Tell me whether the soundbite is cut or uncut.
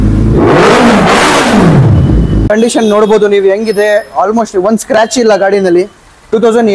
cut